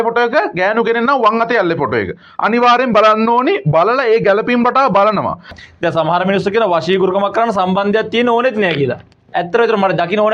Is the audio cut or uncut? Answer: cut